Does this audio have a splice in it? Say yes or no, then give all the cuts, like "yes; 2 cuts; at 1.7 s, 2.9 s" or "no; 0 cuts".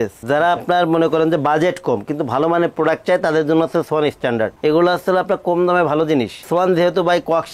no; 0 cuts